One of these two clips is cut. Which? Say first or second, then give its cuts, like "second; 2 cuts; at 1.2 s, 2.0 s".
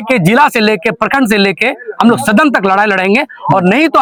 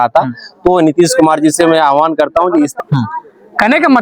second; 1 cut; at 2.7 s